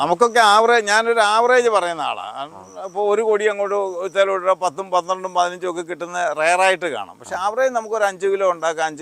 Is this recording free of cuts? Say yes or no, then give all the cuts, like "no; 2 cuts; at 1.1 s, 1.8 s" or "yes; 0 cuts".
yes; 0 cuts